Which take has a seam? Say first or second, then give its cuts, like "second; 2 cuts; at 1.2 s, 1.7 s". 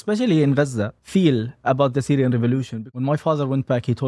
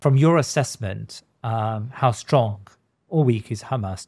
first; 2 cuts; at 1.0 s, 2.8 s